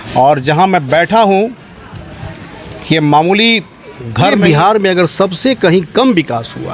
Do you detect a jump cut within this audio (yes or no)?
yes